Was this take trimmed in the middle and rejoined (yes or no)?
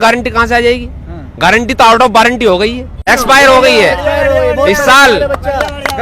yes